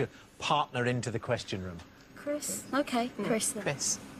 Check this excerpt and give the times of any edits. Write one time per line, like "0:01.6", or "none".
none